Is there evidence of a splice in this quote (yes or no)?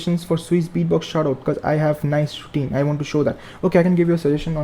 no